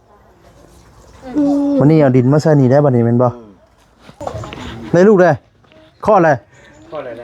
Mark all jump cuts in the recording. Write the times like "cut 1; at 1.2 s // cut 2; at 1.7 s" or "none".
cut 1; at 4.2 s